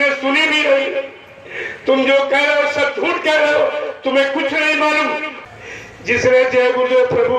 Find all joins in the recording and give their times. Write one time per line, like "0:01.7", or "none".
0:05.3